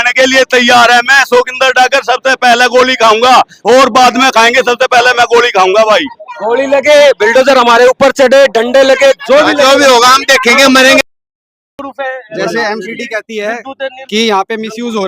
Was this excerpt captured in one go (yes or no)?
no